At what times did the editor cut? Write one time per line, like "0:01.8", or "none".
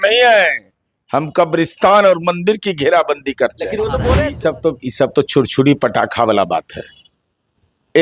0:04.1